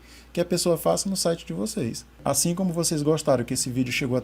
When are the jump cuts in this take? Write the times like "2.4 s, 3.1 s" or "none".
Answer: 2.2 s